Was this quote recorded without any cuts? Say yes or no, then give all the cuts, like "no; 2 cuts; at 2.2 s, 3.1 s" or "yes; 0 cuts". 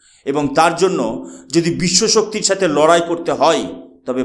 yes; 0 cuts